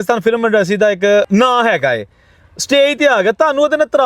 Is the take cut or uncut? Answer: cut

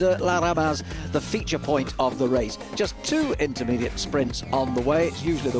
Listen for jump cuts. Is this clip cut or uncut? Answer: cut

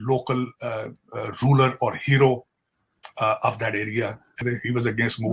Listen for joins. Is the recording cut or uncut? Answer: cut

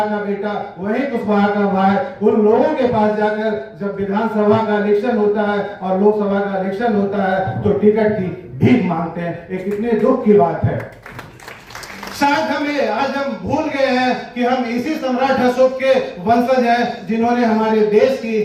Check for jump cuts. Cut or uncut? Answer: uncut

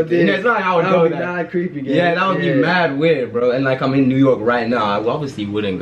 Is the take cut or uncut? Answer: uncut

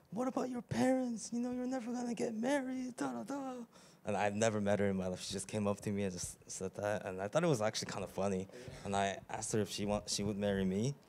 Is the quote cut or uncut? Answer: uncut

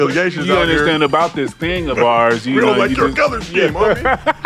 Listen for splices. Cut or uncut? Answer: uncut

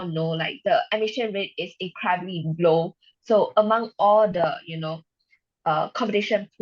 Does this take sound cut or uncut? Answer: uncut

